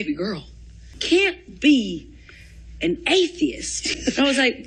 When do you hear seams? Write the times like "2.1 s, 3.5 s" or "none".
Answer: none